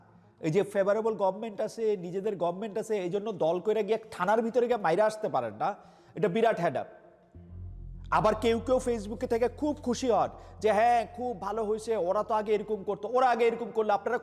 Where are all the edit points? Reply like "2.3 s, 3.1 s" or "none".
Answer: none